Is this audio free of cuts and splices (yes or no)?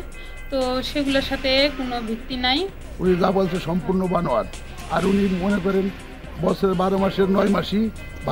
no